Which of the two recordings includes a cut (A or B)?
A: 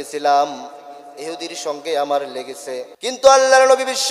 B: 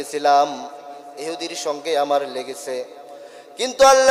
A